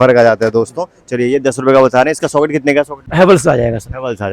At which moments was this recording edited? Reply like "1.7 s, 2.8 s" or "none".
3.0 s